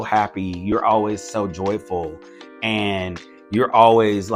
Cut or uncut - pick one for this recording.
uncut